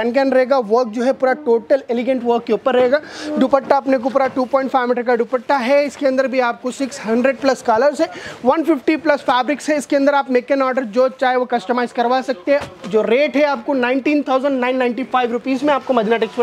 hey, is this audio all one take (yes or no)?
yes